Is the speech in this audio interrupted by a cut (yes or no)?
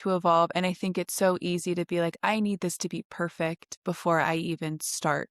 yes